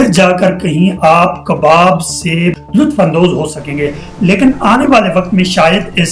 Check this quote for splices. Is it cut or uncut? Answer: cut